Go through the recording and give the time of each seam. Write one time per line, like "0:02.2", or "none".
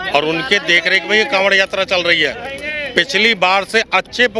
none